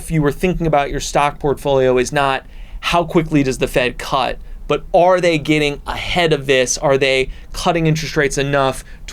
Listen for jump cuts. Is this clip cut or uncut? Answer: uncut